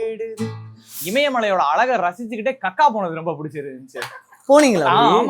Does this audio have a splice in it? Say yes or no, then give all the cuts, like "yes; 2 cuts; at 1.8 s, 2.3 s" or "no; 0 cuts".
yes; 1 cut; at 1.0 s